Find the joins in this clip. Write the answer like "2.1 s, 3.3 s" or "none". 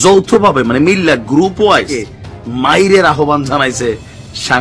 2.0 s

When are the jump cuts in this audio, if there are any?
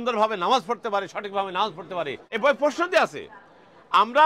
2.2 s

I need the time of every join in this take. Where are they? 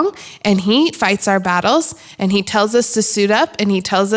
1.0 s

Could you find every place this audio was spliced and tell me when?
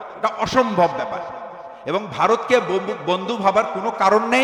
none

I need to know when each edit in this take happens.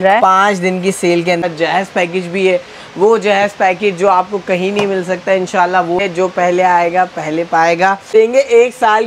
1.4 s, 6.0 s, 8.1 s

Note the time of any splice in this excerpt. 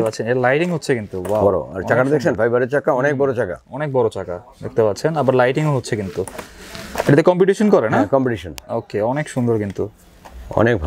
none

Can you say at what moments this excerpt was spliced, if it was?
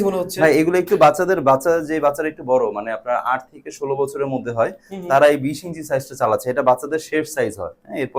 none

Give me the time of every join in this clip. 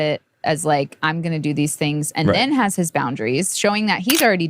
none

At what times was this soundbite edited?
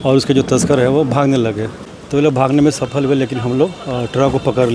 1.4 s

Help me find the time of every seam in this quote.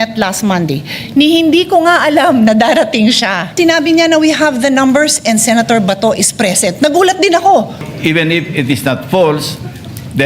3.5 s, 7.9 s

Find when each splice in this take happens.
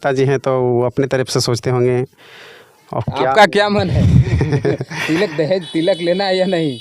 none

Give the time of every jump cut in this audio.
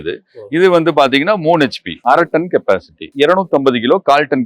2.0 s, 3.0 s

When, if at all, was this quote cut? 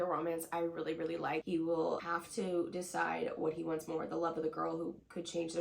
1.4 s, 2.0 s

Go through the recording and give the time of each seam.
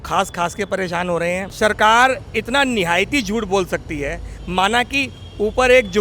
1.5 s

